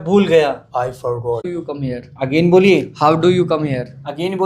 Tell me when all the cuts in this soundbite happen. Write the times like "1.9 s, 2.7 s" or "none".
1.5 s